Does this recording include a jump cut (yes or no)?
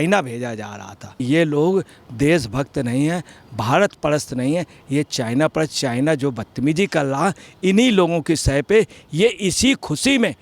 yes